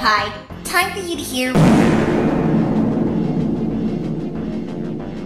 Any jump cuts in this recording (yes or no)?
no